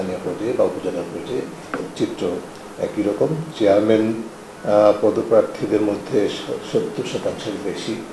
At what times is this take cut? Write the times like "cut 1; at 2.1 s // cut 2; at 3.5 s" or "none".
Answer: none

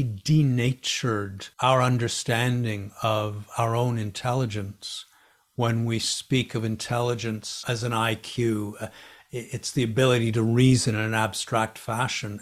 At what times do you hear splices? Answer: cut 1; at 1.4 s

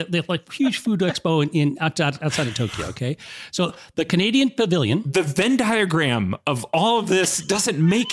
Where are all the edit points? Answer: cut 1; at 5.0 s

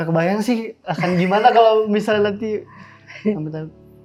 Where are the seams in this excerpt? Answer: none

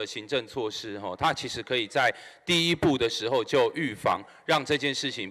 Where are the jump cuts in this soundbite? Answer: none

